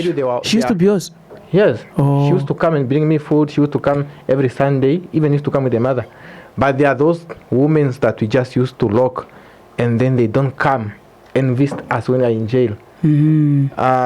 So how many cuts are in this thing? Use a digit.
0